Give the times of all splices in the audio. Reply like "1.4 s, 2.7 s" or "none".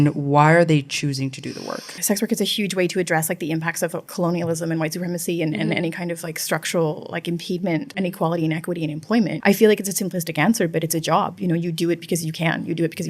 1.9 s, 4.0 s, 7.9 s, 9.4 s